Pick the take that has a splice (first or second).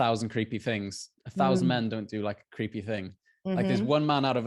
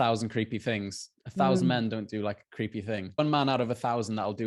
second